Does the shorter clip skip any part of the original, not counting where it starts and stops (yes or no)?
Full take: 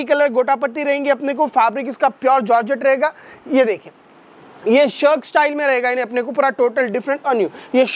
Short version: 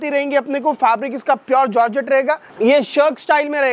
yes